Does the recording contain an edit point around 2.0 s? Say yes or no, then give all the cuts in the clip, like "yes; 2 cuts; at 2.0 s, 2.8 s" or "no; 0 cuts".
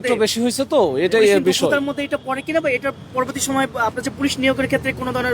no; 0 cuts